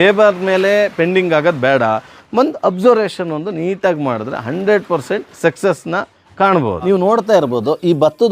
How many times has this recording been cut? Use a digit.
2